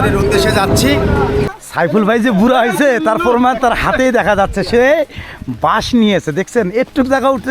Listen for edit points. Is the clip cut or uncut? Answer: cut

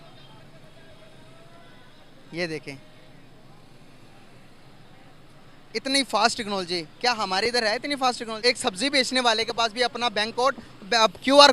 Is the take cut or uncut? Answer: cut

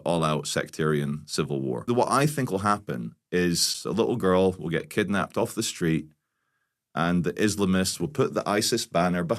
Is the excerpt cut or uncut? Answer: cut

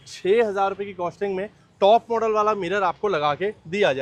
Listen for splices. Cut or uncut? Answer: uncut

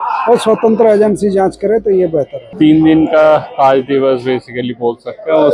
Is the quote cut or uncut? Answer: uncut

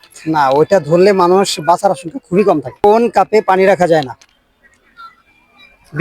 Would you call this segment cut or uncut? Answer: cut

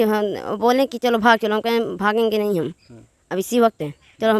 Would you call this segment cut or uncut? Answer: uncut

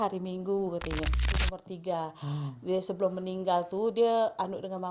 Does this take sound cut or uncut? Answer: cut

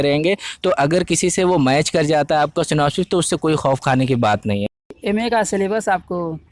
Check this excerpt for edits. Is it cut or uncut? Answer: cut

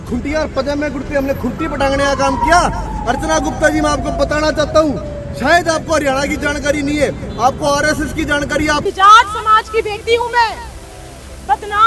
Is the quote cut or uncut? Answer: cut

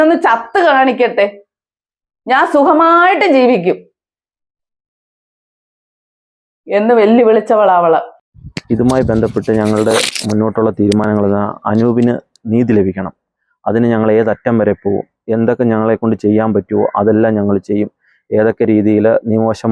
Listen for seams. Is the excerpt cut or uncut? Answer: uncut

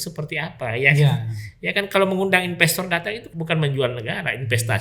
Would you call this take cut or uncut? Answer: cut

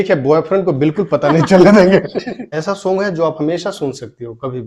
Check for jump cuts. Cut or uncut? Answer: cut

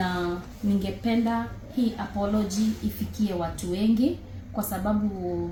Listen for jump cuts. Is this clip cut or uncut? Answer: uncut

